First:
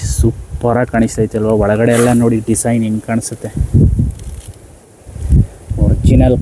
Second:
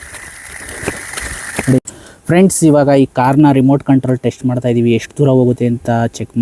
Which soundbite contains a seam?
second; 1 cut; at 1.8 s

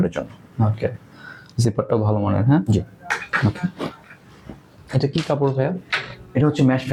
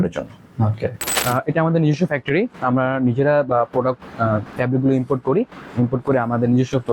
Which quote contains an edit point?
second; 1 cut; at 1.1 s

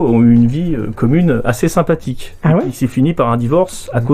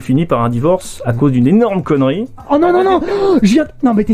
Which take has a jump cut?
second; 1 cut; at 2.4 s

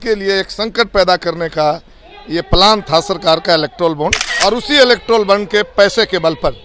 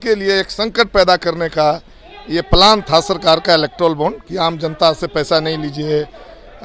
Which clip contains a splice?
first; 1 cut; at 4.2 s

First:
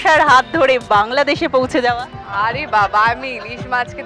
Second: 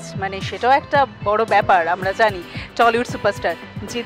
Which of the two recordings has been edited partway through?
first; 1 cut; at 2.1 s

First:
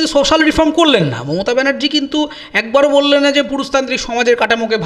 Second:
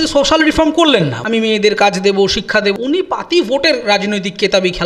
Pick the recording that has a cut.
second; 2 cuts; at 1.2 s, 2.8 s

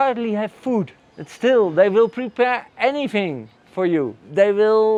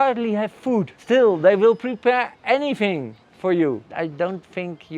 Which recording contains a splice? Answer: second; 2 cuts; at 1.0 s, 3.9 s

